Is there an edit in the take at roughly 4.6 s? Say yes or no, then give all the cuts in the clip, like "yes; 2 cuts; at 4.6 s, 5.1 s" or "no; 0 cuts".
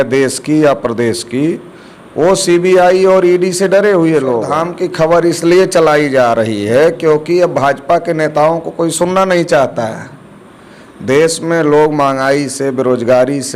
yes; 1 cut; at 4.6 s